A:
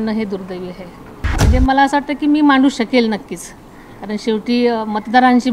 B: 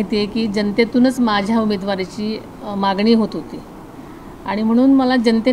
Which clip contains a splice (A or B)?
A